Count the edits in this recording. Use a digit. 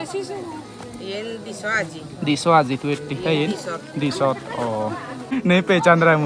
1